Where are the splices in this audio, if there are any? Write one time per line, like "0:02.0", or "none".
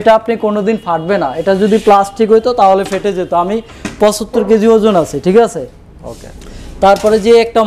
none